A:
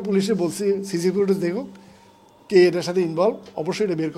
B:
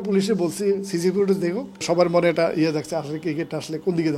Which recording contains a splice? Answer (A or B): B